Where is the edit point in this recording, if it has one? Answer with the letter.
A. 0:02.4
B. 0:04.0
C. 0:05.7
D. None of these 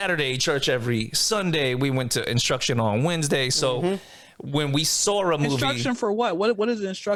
D